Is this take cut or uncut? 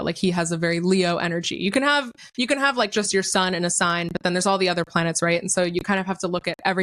uncut